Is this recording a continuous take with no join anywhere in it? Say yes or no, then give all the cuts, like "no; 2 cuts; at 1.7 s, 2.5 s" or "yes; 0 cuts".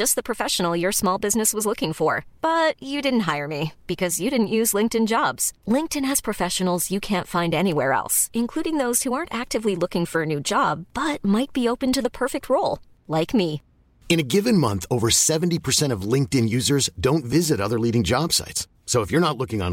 yes; 0 cuts